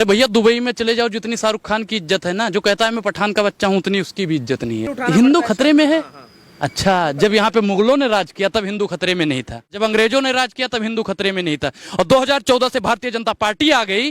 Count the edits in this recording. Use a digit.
2